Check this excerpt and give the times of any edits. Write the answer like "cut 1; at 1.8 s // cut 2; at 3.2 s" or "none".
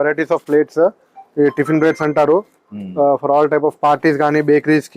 none

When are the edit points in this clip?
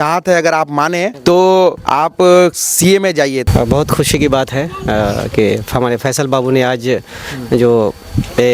cut 1; at 1.1 s // cut 2; at 1.8 s // cut 3; at 3.4 s

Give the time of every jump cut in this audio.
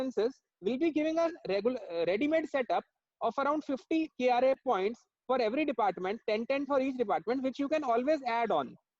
none

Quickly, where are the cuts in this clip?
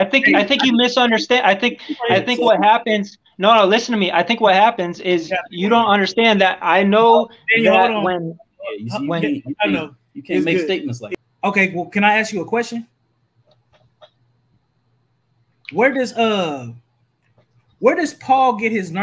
cut 1; at 11.0 s

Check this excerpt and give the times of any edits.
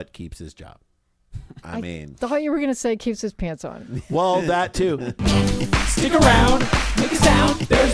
cut 1; at 5.1 s

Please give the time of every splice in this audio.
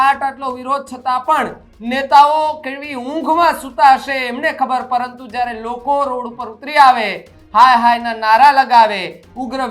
none

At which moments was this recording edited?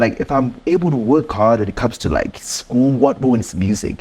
none

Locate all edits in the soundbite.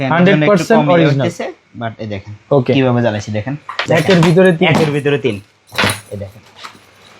cut 1; at 3.7 s

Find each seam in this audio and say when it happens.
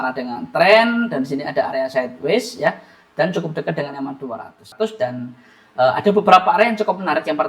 cut 1; at 4.7 s

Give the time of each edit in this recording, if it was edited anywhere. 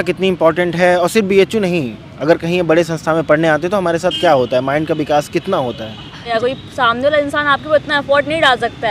cut 1; at 6.3 s

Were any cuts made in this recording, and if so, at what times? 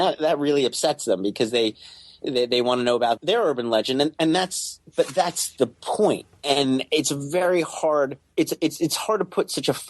cut 1; at 3.2 s // cut 2; at 6.3 s

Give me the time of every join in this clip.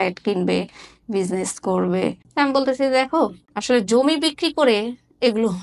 cut 1; at 2.2 s // cut 2; at 3.5 s

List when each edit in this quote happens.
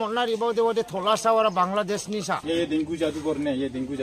cut 1; at 2.5 s

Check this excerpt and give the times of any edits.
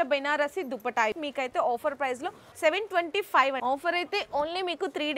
cut 1; at 1.2 s // cut 2; at 3.6 s

